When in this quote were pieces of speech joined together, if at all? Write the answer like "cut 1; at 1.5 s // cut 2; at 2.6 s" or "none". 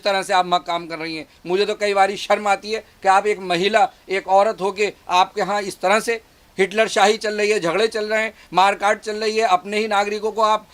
none